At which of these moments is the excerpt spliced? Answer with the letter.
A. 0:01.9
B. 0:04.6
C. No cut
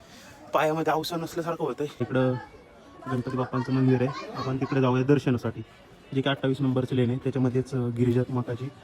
A